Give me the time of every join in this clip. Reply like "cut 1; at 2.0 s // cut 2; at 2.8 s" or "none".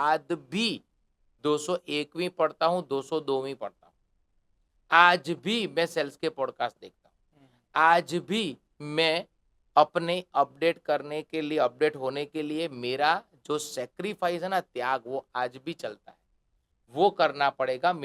none